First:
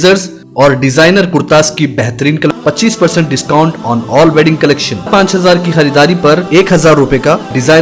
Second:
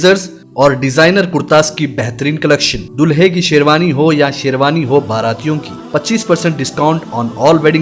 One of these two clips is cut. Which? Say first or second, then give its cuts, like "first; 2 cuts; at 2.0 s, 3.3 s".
first; 2 cuts; at 2.5 s, 5.1 s